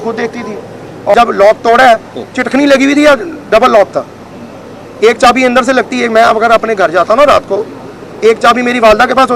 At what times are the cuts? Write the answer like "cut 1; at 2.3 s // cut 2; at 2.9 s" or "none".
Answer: cut 1; at 1.1 s